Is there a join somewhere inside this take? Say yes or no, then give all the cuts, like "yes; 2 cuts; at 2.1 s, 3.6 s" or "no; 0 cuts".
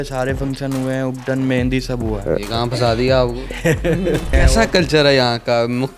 yes; 1 cut; at 4.3 s